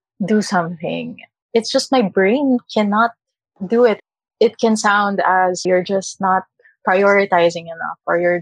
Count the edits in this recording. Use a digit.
3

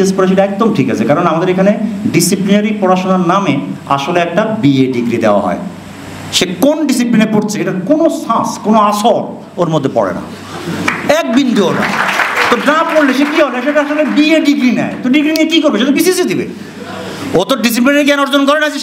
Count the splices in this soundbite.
0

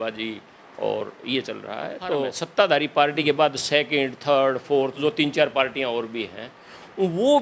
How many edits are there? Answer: 1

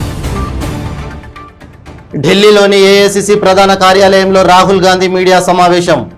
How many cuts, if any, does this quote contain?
1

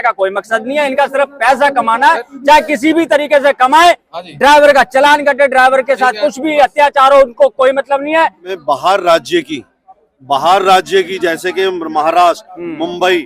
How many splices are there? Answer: 1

